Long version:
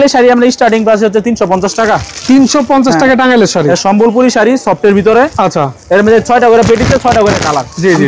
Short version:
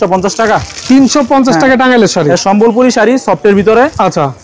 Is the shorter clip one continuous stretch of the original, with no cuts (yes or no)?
yes